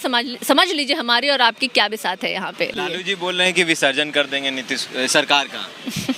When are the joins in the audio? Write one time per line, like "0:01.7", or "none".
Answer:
0:02.7